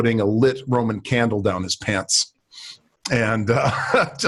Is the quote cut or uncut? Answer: uncut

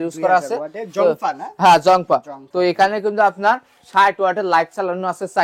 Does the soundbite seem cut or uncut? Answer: uncut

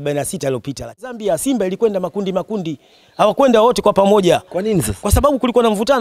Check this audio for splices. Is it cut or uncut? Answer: cut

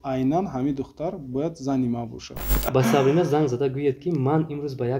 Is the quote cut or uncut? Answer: cut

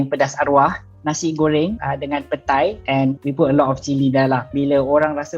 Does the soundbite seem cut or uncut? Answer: uncut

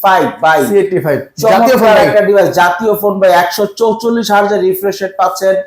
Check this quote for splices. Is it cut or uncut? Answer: uncut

